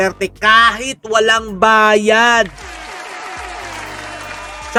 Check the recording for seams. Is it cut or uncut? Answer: uncut